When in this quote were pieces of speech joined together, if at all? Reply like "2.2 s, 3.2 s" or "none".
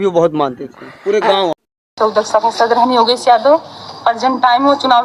1.5 s